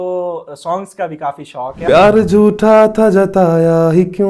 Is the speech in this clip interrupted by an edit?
yes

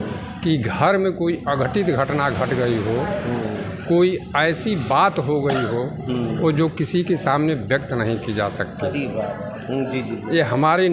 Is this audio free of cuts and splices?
yes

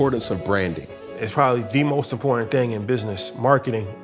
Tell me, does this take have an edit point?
yes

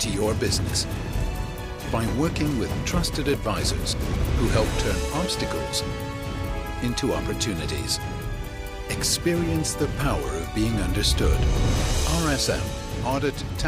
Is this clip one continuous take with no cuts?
yes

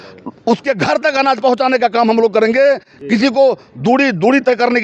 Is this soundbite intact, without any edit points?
yes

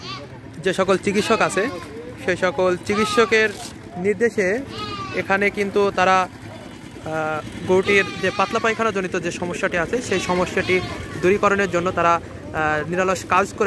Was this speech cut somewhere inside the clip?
no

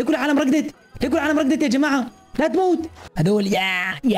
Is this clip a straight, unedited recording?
no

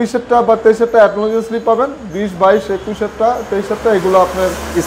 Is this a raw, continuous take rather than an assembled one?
yes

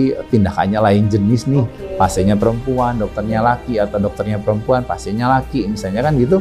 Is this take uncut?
yes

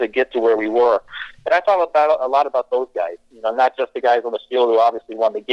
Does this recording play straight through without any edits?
yes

